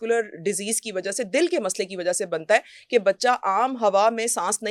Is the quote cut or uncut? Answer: uncut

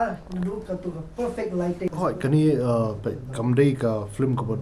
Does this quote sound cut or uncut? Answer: cut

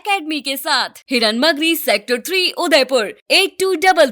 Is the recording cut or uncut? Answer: uncut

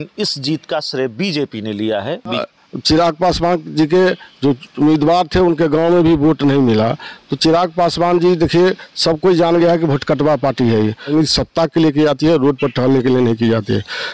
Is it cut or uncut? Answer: cut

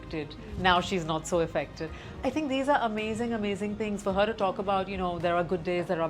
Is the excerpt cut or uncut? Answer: uncut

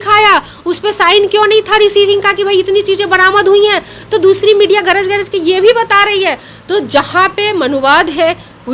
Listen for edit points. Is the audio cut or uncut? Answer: uncut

